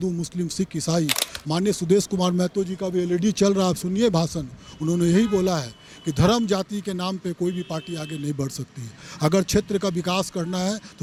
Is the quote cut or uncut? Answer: uncut